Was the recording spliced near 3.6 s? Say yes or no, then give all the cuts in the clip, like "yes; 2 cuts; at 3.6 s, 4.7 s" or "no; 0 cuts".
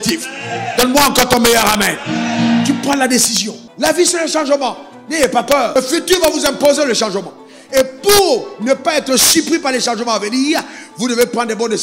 yes; 2 cuts; at 3.6 s, 5.8 s